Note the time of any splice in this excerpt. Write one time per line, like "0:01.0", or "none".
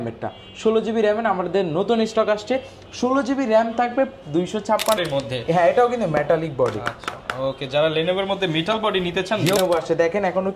0:05.0
0:09.6